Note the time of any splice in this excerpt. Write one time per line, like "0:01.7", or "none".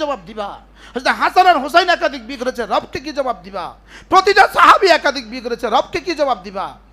none